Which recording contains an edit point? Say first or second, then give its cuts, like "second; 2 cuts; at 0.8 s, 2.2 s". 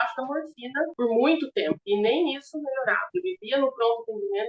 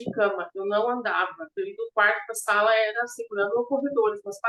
first; 3 cuts; at 0.9 s, 1.8 s, 3.1 s